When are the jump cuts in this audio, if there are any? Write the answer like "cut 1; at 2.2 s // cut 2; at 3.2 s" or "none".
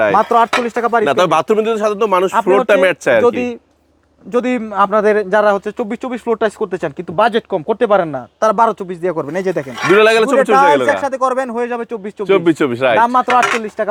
none